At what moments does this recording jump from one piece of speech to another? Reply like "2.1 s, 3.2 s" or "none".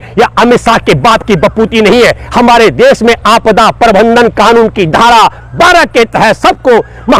none